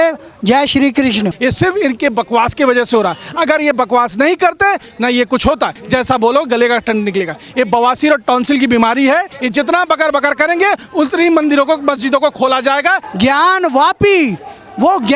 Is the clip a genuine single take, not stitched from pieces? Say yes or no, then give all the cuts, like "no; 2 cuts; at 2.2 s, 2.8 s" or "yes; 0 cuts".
no; 4 cuts; at 1.3 s, 5.8 s, 9.4 s, 13.1 s